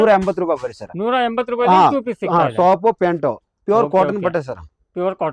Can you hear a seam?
no; 0 cuts

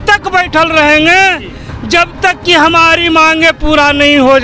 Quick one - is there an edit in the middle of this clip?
no; 0 cuts

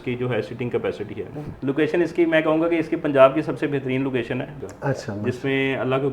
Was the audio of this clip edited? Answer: yes; 2 cuts; at 1.4 s, 4.5 s

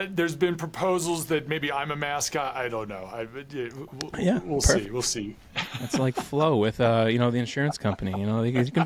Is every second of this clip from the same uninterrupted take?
yes; 0 cuts

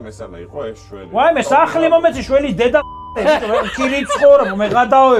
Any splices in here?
no; 0 cuts

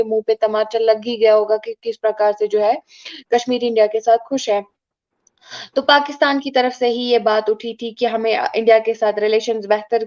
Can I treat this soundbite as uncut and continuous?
yes; 0 cuts

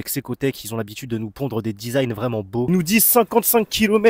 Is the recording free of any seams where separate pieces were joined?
no; 1 cut; at 2.7 s

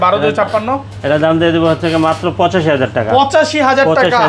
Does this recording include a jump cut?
no; 0 cuts

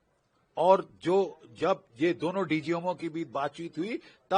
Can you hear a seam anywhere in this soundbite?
no; 0 cuts

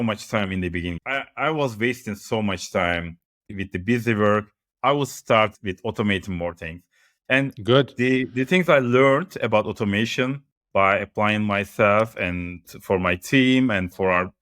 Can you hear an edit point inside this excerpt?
yes; 3 cuts; at 0.9 s, 3.5 s, 12.6 s

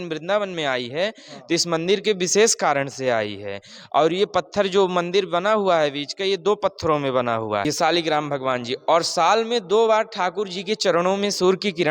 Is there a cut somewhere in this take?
yes; 1 cut; at 7.7 s

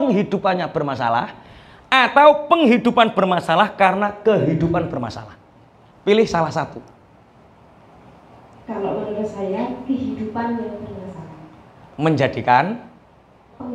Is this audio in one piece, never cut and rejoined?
yes; 0 cuts

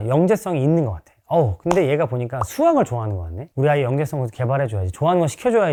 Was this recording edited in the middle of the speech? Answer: no; 0 cuts

